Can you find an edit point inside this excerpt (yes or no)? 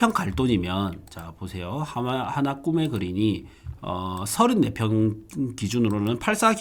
no